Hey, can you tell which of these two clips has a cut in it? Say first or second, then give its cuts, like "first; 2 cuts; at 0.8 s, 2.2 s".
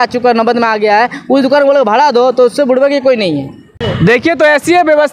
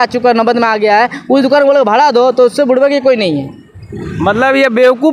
first; 1 cut; at 3.8 s